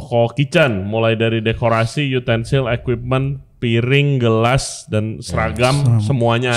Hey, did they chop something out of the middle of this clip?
no; 0 cuts

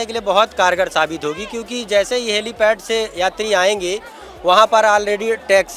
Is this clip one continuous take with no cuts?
yes; 0 cuts

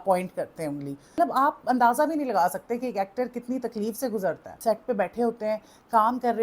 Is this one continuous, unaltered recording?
no; 2 cuts; at 1.2 s, 4.5 s

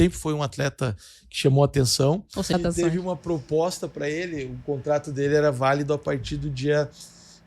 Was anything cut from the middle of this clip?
yes; 1 cut; at 2.5 s

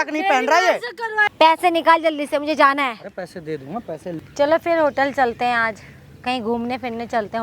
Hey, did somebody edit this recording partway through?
yes; 2 cuts; at 1.2 s, 4.1 s

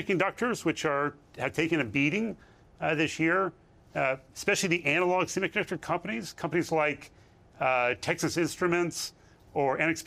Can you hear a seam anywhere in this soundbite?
no; 0 cuts

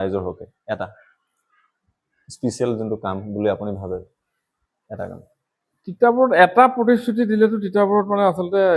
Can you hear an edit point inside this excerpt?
no; 0 cuts

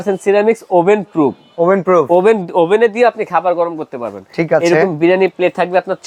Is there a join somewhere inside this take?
no; 0 cuts

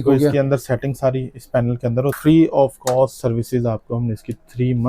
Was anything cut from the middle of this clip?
yes; 1 cut; at 2.1 s

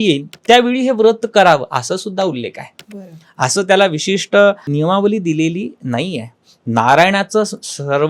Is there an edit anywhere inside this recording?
yes; 1 cut; at 4.7 s

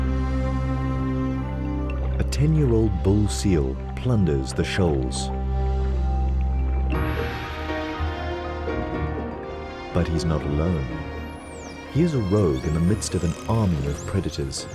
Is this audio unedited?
no; 1 cut; at 3.6 s

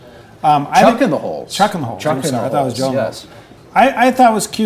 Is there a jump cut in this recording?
yes; 1 cut; at 3.5 s

